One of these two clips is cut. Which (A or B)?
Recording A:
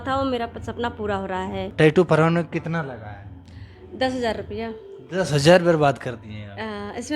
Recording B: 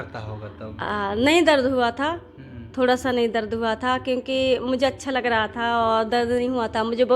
A